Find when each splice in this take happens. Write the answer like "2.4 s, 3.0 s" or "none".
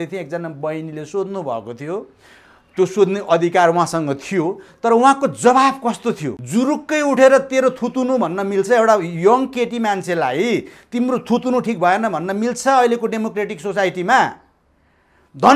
6.3 s